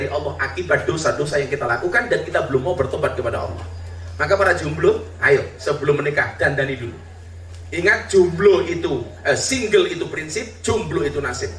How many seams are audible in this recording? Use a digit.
0